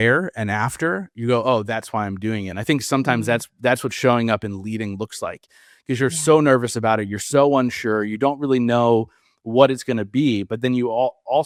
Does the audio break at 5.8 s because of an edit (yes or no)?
no